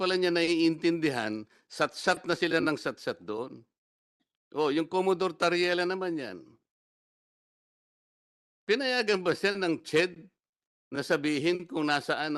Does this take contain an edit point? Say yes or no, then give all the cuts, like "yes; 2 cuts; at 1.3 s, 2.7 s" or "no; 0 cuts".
no; 0 cuts